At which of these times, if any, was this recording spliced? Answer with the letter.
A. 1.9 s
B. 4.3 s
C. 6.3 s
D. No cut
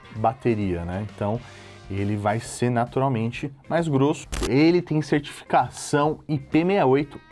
B